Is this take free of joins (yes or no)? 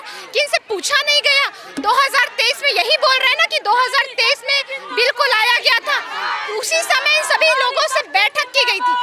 yes